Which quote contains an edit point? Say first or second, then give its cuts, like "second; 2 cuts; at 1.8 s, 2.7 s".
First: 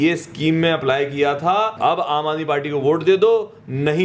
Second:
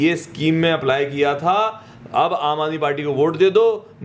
first; 1 cut; at 1.7 s